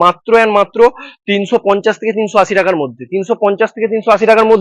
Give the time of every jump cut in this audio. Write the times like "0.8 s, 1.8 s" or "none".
none